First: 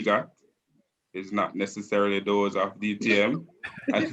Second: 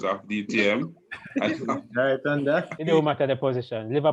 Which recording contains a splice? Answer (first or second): second